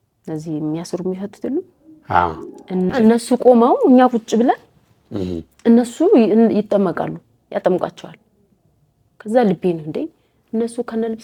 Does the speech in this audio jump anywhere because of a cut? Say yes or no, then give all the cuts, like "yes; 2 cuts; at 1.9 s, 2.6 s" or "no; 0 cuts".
no; 0 cuts